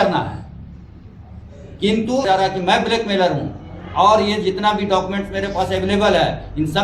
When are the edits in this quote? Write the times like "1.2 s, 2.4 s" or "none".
2.2 s

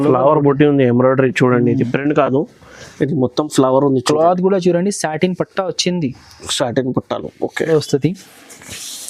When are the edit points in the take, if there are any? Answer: 7.7 s

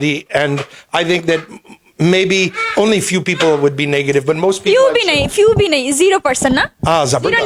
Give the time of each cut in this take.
none

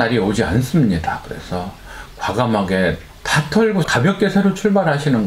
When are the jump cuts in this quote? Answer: 3.8 s

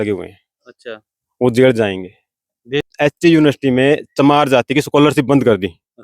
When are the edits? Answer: 2.8 s

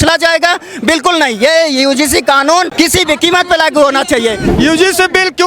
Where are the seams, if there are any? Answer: 2.7 s, 4.5 s

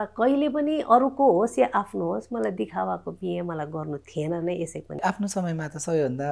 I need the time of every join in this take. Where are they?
5.0 s

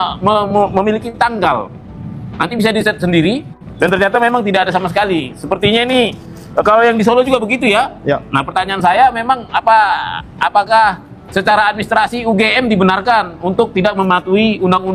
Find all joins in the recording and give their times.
none

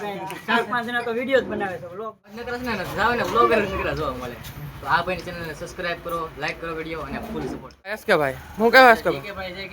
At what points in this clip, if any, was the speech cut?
2.4 s, 8.0 s

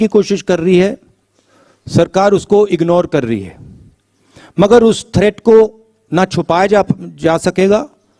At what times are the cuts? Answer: none

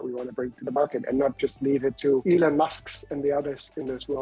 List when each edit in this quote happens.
2.2 s

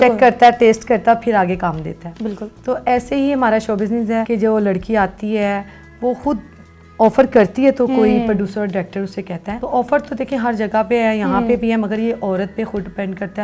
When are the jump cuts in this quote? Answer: none

